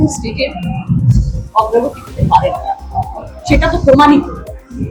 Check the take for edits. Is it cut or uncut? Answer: uncut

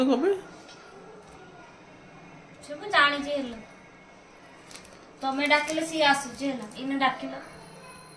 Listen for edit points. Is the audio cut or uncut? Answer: uncut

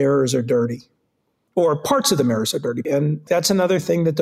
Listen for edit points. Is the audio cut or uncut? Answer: cut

